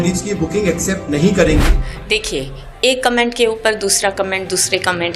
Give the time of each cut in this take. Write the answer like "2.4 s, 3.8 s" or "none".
1.8 s